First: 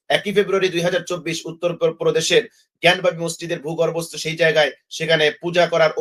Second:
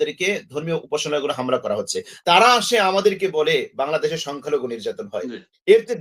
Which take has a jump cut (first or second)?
second